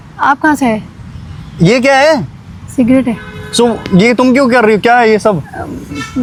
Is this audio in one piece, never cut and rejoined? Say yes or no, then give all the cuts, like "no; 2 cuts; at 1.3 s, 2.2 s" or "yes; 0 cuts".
yes; 0 cuts